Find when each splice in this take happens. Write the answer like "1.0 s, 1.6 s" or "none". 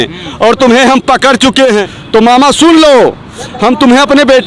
1.9 s